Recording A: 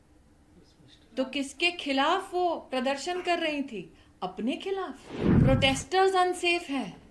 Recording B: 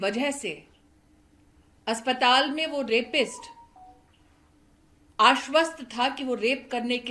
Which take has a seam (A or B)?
A